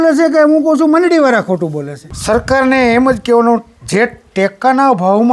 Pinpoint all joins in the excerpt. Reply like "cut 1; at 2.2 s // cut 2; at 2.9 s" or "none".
cut 1; at 2.0 s